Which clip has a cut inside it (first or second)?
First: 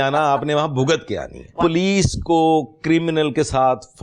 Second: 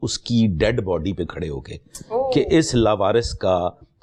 first